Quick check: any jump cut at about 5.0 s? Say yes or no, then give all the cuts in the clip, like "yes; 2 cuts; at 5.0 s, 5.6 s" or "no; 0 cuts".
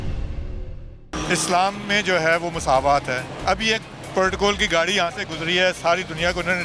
no; 2 cuts; at 1.1 s, 3.3 s